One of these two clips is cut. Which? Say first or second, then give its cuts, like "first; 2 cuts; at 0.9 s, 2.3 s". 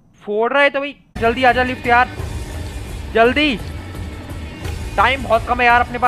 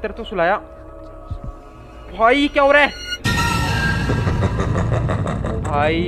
first; 1 cut; at 1.2 s